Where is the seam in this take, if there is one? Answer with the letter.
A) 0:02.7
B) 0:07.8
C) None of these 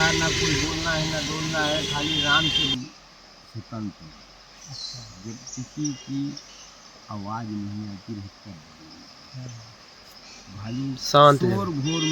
A